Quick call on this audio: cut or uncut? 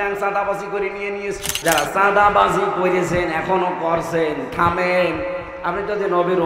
cut